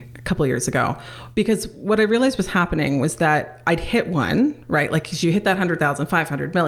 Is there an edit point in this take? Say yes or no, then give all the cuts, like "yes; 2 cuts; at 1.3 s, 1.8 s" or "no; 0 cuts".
no; 0 cuts